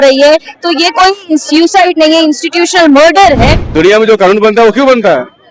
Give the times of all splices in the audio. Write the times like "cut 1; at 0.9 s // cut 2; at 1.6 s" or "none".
cut 1; at 3.6 s